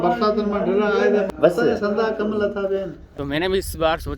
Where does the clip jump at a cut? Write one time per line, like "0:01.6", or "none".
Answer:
0:01.3
0:03.0